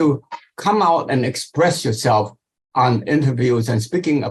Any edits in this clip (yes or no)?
no